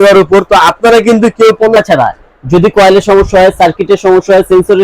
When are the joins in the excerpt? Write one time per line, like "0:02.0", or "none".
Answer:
0:01.8